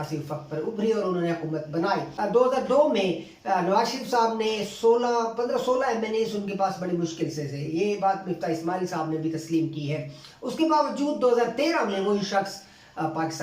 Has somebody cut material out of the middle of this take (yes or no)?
yes